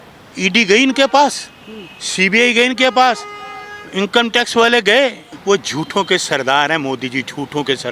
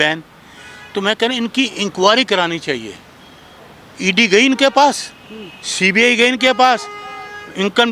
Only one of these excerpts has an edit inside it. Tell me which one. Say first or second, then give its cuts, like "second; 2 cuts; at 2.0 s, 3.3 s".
first; 1 cut; at 5.3 s